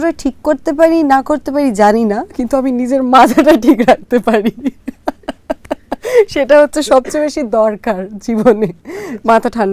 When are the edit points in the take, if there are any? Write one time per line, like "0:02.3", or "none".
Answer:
none